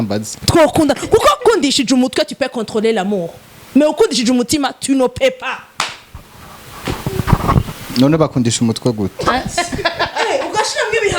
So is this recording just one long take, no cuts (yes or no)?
no